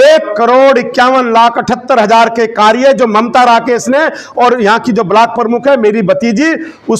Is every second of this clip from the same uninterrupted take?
yes; 0 cuts

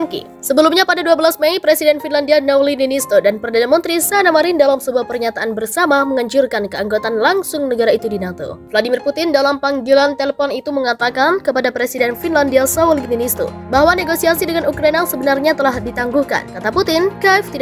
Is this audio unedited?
yes; 0 cuts

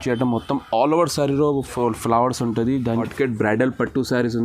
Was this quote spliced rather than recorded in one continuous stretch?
yes; 1 cut; at 3.1 s

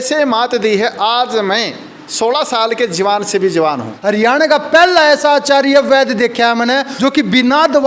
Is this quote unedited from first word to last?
no; 2 cuts; at 3.9 s, 6.9 s

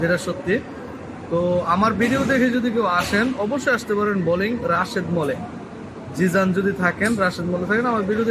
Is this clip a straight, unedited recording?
yes; 0 cuts

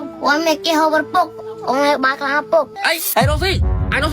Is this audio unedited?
no; 1 cut; at 2.8 s

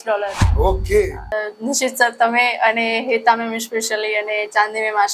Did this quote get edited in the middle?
yes; 1 cut; at 1.4 s

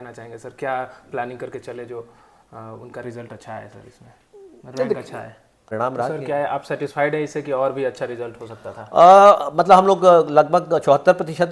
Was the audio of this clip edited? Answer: yes; 1 cut; at 5.7 s

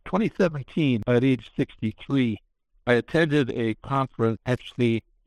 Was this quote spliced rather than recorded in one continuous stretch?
yes; 2 cuts; at 1.0 s, 4.4 s

